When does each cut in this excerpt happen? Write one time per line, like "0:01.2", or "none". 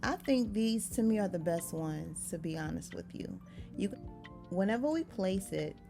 0:03.9